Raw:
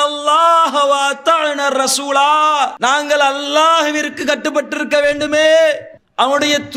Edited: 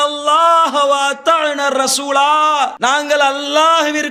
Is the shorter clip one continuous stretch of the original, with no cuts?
yes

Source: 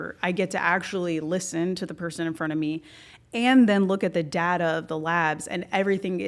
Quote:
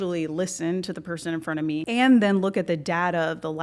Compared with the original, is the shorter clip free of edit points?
no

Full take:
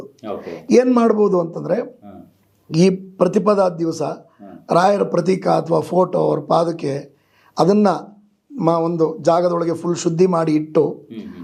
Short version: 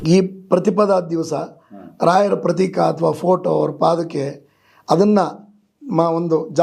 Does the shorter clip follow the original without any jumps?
yes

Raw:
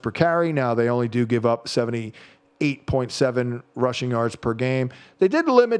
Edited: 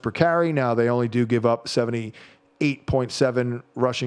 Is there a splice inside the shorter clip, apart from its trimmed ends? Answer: no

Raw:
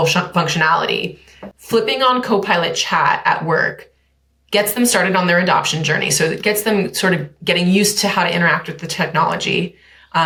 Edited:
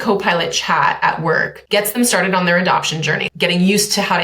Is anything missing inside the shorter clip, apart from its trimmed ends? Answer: yes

